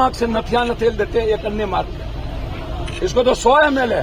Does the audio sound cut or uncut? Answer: uncut